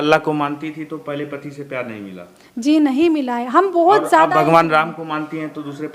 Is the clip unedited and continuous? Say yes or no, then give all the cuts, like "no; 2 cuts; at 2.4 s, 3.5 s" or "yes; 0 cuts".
yes; 0 cuts